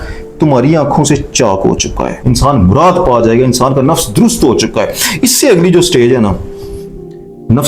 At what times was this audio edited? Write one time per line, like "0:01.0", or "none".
0:02.1

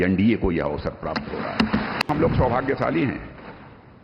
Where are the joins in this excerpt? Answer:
0:02.0

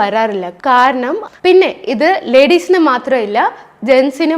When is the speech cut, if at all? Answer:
0:01.2

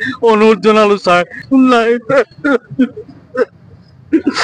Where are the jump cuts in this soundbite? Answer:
0:01.4

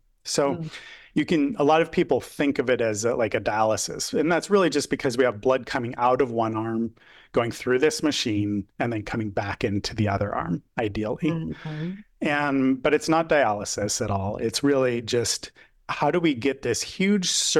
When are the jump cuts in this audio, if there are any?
none

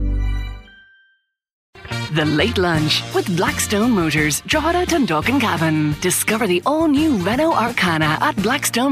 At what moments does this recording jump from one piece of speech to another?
0:01.8

